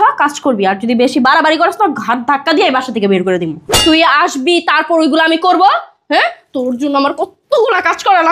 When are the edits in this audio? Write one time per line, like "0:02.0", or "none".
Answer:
0:03.6